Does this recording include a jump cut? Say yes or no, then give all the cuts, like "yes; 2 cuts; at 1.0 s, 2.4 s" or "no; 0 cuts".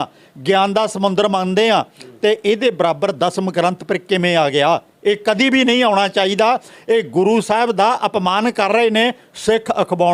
no; 0 cuts